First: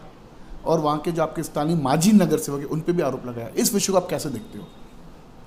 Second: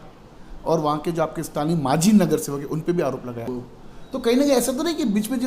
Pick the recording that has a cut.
second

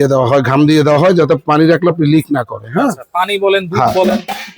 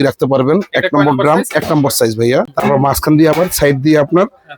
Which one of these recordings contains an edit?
second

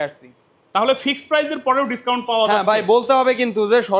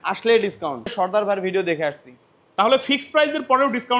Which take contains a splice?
second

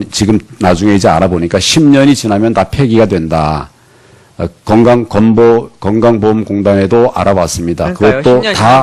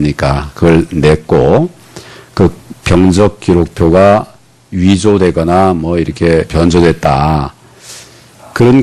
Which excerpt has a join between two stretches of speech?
second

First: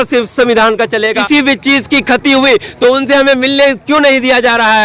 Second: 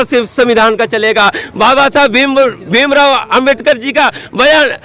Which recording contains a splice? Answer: first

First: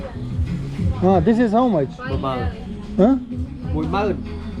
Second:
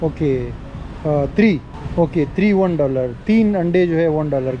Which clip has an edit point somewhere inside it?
second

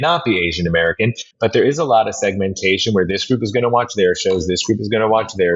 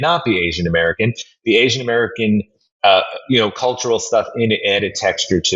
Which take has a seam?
first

